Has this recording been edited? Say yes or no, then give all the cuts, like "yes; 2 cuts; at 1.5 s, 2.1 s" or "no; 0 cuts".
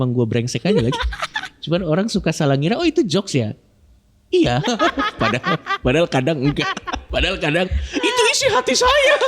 yes; 1 cut; at 7.1 s